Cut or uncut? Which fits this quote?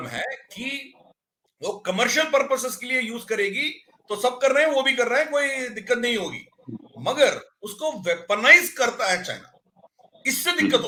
uncut